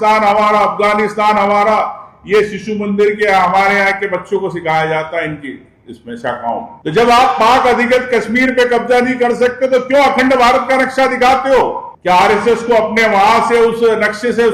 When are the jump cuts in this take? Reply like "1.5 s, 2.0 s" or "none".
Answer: none